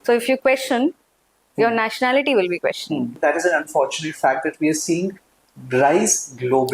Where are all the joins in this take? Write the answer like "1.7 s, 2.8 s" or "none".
3.2 s